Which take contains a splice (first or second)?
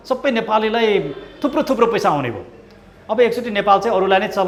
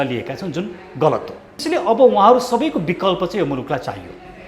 second